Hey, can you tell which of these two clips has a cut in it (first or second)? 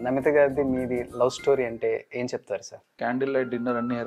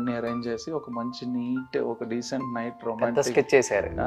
first